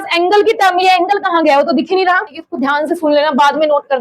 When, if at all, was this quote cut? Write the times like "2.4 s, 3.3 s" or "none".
2.5 s

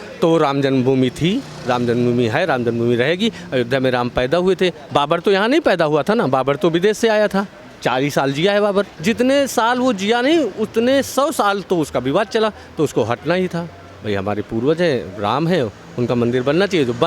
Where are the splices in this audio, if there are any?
4.8 s, 8.9 s

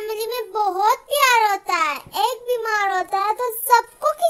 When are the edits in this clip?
2.0 s

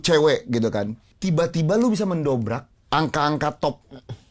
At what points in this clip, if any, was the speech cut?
1.0 s, 2.7 s

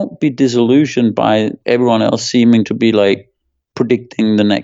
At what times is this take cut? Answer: none

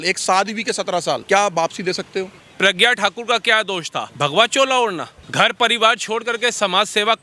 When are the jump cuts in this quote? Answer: 1.2 s, 2.4 s, 4.0 s, 5.1 s

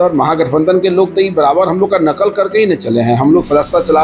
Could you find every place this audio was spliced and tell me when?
none

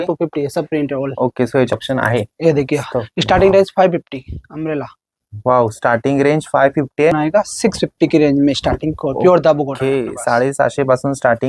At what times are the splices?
1.7 s, 7.2 s

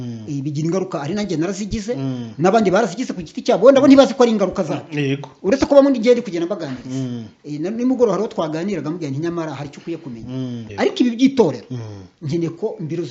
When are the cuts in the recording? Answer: 10.7 s

